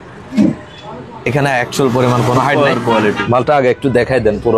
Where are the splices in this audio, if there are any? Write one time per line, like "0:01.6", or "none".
0:03.0